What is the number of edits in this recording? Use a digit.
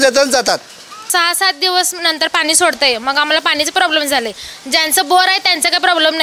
1